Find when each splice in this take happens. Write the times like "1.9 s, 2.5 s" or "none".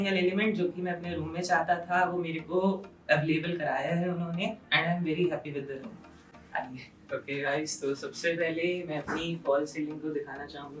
none